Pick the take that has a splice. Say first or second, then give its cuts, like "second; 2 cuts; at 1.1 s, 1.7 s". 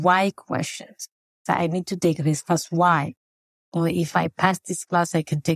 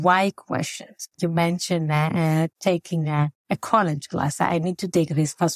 first; 2 cuts; at 1.2 s, 3.6 s